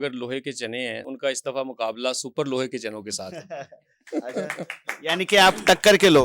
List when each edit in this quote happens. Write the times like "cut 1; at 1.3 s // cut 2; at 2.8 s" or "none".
cut 1; at 1.1 s